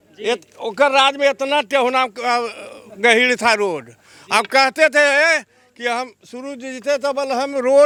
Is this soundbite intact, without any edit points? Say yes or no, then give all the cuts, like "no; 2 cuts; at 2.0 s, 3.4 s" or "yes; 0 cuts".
yes; 0 cuts